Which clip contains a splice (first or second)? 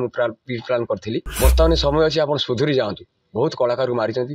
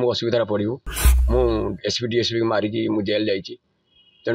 first